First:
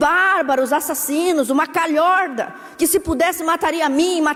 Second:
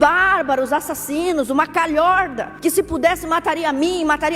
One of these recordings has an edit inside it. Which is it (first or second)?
second